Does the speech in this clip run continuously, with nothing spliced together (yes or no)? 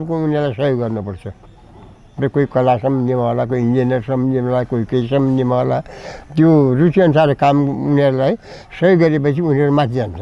yes